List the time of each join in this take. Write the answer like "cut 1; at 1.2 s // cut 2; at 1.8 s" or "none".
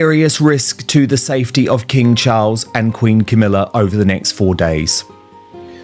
none